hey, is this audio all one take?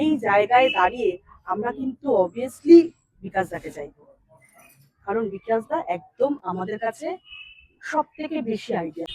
yes; 0 cuts

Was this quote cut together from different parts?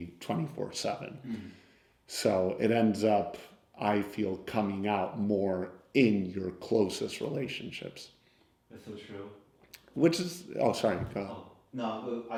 no; 0 cuts

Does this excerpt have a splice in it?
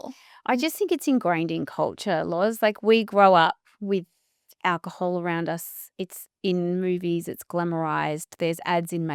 no; 0 cuts

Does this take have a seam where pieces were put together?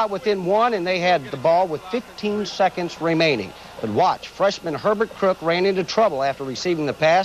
yes; 1 cut; at 3.4 s

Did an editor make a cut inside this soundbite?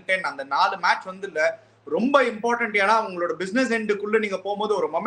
no; 0 cuts

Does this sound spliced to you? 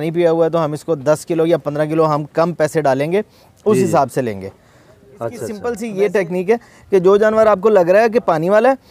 yes; 1 cut; at 5.6 s

